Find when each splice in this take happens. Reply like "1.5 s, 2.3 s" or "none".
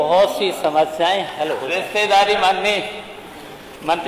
1.7 s